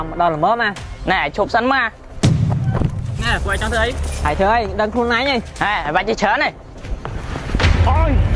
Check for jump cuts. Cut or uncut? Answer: uncut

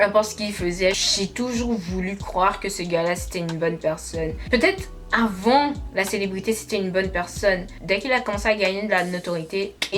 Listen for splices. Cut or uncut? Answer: cut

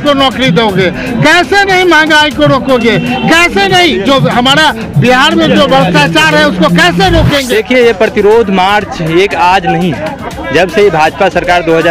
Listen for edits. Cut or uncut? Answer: cut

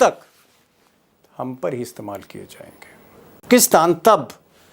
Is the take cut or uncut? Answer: cut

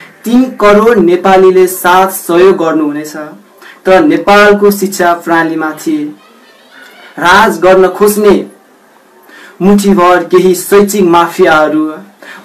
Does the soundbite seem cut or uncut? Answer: uncut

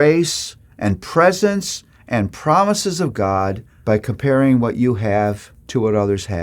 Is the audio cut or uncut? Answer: cut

